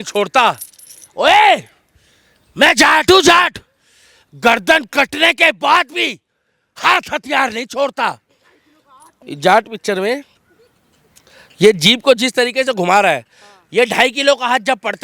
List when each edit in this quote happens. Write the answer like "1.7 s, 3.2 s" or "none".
9.2 s